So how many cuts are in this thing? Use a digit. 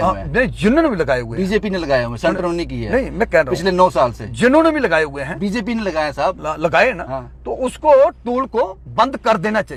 0